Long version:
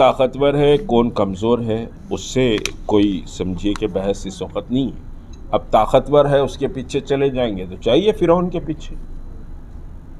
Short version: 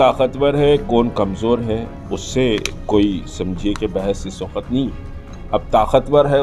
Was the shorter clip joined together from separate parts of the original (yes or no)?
no